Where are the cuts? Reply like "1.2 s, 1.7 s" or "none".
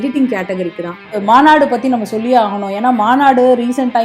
1.2 s